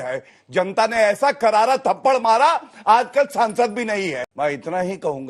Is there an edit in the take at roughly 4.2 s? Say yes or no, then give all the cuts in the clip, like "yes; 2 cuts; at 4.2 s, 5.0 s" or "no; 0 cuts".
yes; 1 cut; at 4.2 s